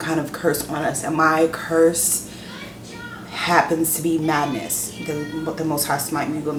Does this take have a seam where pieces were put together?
no; 0 cuts

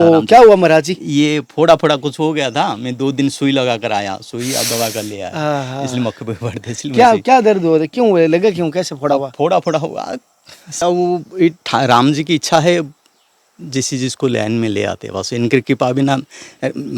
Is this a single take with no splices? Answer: no; 1 cut; at 10.8 s

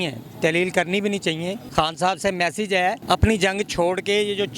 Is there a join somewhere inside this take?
yes; 2 cuts; at 1.6 s, 3.0 s

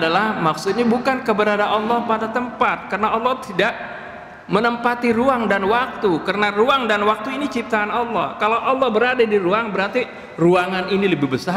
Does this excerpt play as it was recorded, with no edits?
yes; 0 cuts

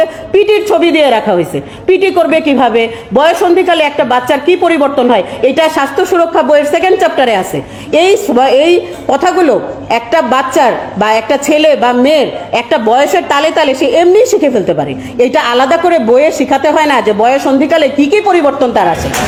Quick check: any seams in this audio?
no; 0 cuts

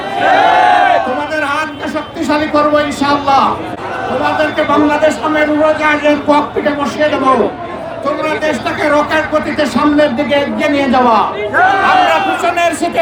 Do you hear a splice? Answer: no; 0 cuts

